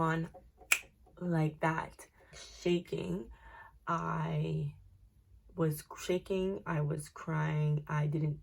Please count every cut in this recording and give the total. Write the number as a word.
zero